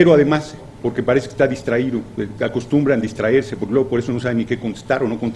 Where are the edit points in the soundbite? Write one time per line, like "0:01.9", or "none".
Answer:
none